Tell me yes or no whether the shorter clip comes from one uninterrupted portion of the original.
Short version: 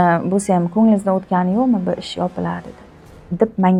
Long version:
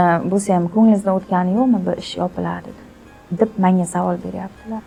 yes